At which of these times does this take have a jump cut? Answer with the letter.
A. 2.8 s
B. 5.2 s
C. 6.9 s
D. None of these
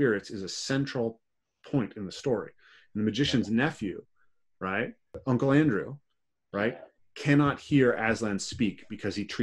B